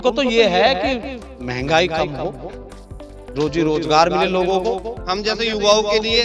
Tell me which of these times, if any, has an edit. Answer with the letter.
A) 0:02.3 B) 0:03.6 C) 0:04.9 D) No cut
C